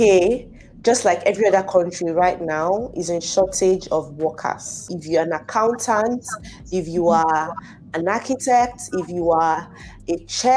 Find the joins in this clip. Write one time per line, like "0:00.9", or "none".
0:04.9